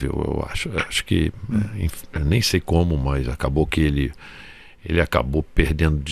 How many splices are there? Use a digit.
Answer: 0